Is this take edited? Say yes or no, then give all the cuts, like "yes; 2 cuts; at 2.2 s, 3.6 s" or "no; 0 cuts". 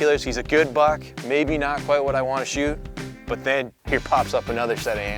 yes; 1 cut; at 3.8 s